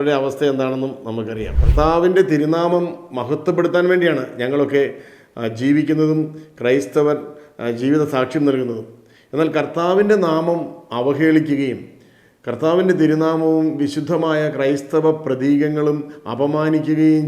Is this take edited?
yes; 1 cut; at 1.6 s

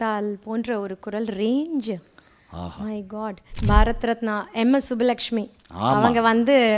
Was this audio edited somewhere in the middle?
yes; 1 cut; at 3.5 s

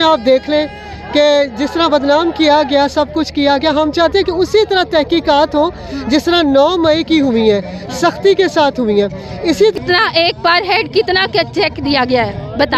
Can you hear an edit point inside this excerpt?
yes; 1 cut; at 9.7 s

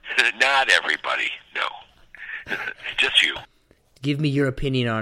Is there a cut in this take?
yes; 1 cut; at 3.7 s

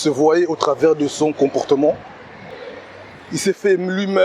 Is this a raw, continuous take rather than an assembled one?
no; 1 cut; at 2.5 s

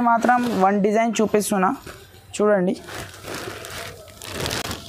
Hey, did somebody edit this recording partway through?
no; 0 cuts

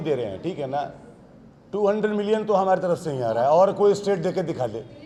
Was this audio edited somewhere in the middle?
no; 0 cuts

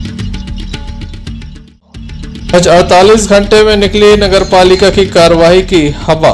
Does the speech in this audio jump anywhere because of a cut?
no; 0 cuts

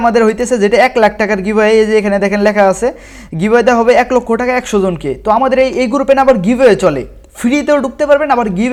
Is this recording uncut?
yes; 0 cuts

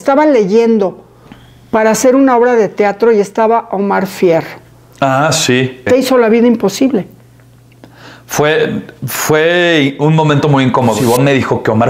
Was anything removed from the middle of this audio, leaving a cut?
yes; 2 cuts; at 5.8 s, 11.0 s

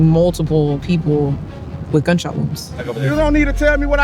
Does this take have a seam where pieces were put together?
yes; 1 cut; at 2.9 s

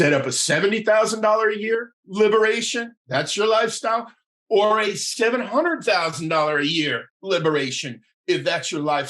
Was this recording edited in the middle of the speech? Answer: no; 0 cuts

